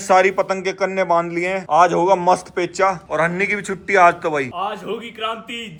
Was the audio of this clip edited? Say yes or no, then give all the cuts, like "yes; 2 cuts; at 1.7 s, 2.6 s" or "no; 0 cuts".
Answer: no; 0 cuts